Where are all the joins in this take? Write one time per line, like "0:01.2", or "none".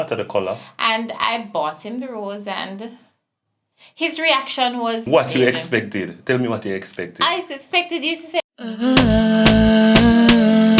0:05.1
0:08.4